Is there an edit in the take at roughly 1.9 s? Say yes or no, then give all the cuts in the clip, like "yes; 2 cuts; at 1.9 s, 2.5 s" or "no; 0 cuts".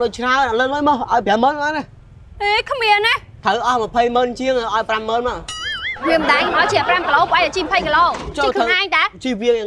no; 0 cuts